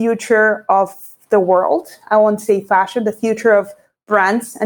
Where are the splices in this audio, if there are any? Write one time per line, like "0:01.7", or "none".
none